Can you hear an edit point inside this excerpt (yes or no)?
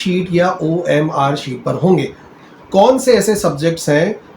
yes